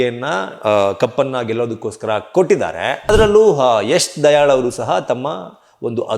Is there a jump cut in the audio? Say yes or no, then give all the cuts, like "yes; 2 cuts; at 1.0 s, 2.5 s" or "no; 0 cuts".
yes; 1 cut; at 3.0 s